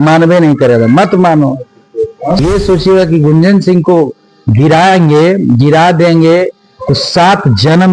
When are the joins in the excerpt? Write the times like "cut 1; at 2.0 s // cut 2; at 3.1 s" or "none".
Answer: cut 1; at 2.2 s